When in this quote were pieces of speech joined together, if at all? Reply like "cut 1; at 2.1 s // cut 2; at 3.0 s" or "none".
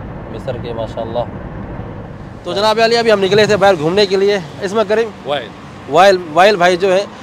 cut 1; at 2.2 s